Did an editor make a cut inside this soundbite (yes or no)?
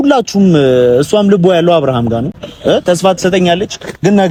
no